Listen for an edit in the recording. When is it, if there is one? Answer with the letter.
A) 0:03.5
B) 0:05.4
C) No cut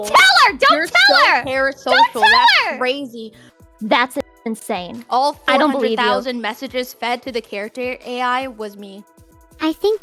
A